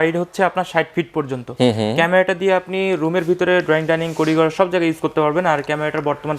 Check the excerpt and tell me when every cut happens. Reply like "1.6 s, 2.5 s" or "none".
none